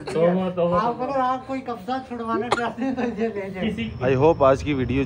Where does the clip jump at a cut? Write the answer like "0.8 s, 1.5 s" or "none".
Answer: none